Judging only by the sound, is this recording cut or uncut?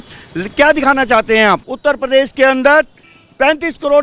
cut